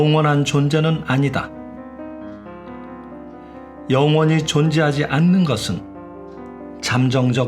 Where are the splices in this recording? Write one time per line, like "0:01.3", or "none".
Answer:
0:01.4
0:03.9